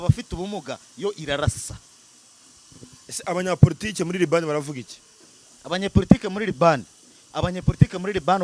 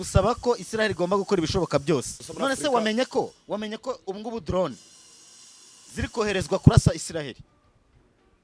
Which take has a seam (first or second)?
second